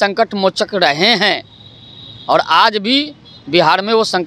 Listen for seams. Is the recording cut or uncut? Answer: uncut